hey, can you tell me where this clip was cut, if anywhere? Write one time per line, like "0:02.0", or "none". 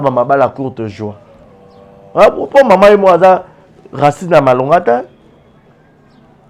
none